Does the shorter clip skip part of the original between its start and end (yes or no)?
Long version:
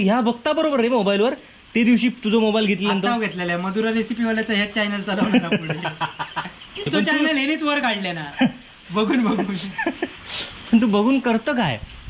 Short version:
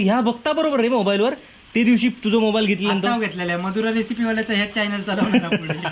no